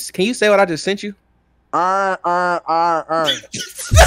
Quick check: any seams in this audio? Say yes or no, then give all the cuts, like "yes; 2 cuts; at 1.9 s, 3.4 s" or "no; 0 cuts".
no; 0 cuts